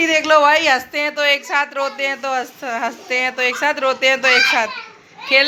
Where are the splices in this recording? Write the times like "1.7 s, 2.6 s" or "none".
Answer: none